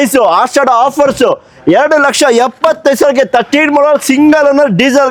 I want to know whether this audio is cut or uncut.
uncut